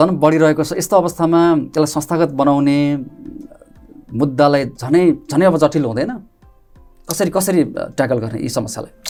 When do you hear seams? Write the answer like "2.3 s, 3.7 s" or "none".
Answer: none